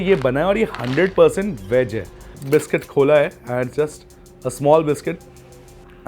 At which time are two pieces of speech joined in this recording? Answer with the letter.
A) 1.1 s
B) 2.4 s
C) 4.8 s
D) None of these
B